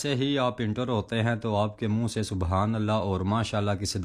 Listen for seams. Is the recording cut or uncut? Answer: uncut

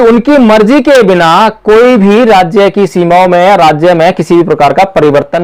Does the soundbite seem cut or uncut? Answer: uncut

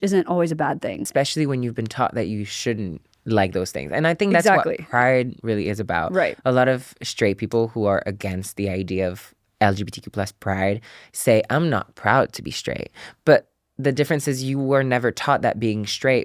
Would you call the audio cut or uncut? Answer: cut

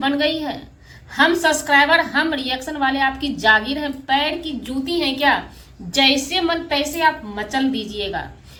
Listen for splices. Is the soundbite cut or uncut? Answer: uncut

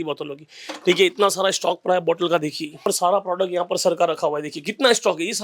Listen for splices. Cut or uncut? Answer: cut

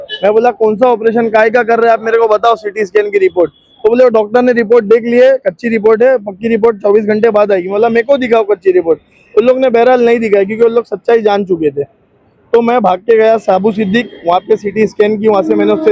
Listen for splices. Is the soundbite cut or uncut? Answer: uncut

